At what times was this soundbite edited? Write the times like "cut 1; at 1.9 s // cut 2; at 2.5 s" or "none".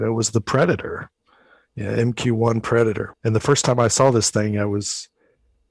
cut 1; at 3.1 s